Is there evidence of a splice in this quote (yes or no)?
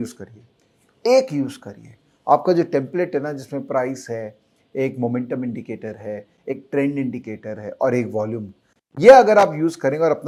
no